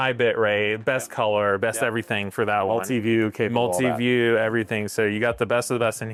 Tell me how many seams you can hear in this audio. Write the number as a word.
zero